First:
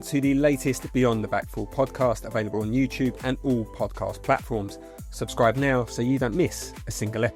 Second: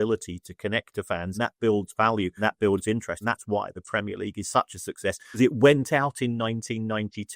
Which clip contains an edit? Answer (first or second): second